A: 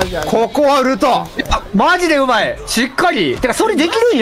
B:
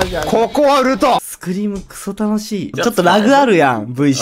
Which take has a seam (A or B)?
B